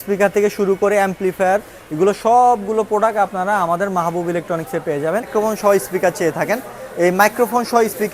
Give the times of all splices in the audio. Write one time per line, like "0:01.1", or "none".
0:05.3